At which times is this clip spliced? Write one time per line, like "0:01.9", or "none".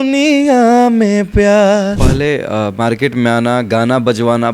0:02.0